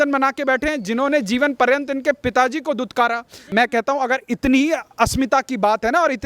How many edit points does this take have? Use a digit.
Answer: 1